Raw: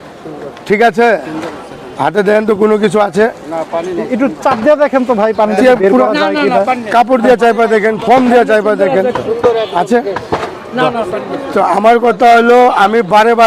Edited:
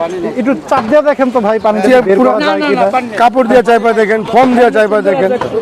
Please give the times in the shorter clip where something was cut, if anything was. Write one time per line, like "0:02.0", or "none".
none